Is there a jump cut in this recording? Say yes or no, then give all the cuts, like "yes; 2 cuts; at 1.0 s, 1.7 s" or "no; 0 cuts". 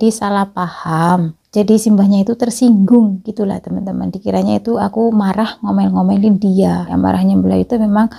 yes; 2 cuts; at 1.4 s, 6.9 s